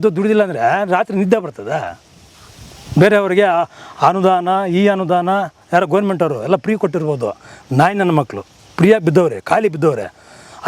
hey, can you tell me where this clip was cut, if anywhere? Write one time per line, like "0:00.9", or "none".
none